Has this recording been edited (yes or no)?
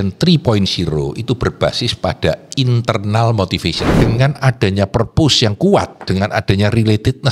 yes